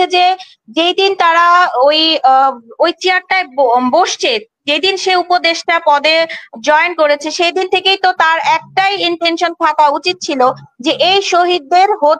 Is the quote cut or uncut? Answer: uncut